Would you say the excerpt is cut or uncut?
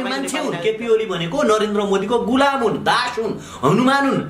uncut